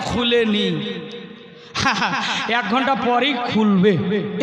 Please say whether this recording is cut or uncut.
uncut